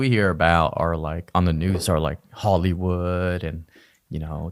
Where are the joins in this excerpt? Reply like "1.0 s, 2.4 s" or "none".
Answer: none